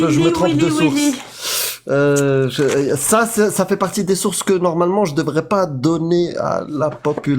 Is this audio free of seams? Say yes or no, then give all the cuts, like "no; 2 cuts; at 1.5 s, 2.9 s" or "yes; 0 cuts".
yes; 0 cuts